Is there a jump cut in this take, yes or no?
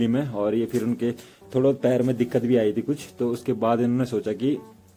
no